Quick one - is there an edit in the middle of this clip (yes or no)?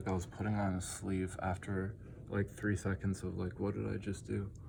no